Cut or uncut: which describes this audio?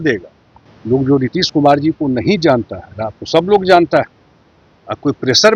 uncut